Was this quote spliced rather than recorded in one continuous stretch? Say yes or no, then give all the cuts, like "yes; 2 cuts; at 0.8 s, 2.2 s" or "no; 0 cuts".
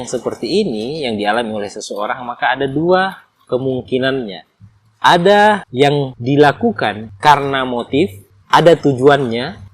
no; 0 cuts